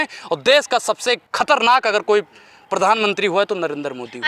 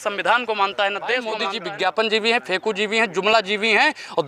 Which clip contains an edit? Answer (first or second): second